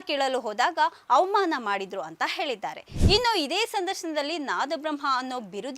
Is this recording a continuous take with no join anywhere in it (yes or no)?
no